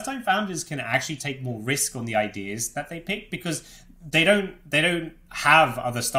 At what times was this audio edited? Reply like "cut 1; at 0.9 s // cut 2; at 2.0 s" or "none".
none